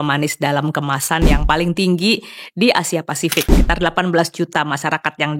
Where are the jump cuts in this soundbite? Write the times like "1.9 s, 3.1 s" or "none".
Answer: 3.6 s